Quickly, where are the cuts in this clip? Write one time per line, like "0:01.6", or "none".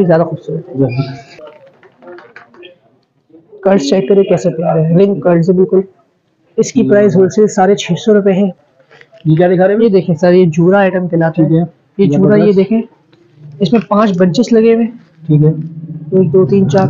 0:01.3
0:08.6